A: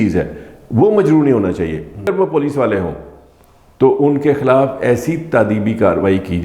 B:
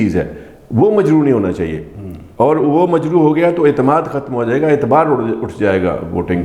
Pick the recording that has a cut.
A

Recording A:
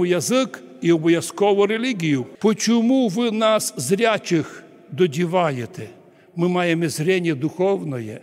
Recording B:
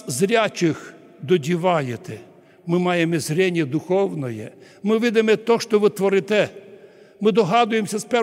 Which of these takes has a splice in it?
A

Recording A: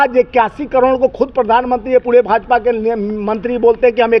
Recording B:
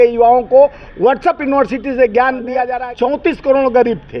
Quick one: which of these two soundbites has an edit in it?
B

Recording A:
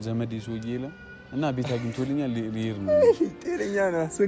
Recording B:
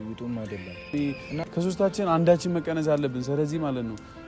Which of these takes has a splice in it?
B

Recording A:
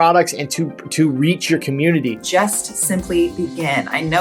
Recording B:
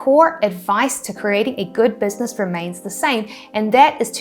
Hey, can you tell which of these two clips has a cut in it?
A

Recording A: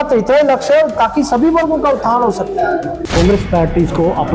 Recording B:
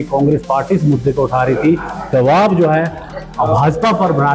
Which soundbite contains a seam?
A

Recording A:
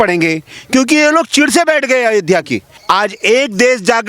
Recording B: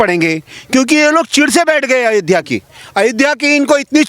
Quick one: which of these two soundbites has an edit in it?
A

